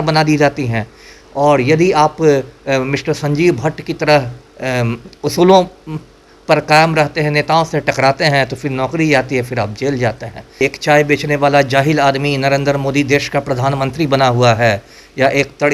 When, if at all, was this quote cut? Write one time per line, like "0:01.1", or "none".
0:10.6